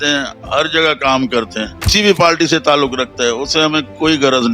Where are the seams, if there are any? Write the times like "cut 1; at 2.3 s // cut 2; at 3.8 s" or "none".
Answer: cut 1; at 1.9 s